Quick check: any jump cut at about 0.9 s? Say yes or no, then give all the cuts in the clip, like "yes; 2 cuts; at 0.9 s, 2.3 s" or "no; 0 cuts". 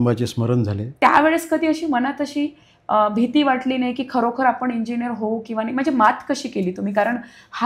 yes; 1 cut; at 0.9 s